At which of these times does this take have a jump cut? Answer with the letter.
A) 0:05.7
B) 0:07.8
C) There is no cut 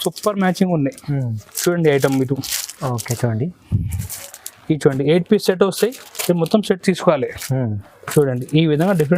C